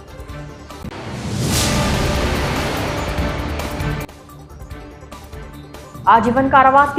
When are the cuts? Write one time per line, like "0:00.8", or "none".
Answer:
none